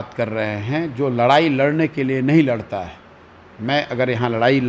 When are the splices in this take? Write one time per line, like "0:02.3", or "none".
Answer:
none